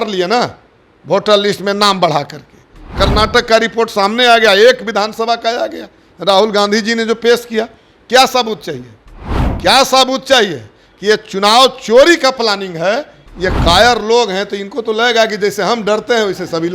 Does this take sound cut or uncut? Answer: cut